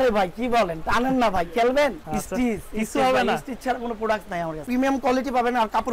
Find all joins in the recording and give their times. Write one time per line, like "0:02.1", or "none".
0:02.0
0:04.6